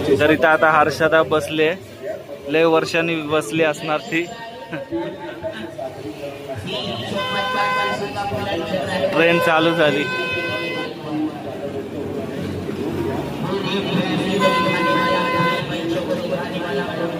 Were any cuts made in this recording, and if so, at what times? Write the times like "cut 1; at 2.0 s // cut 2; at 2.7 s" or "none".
none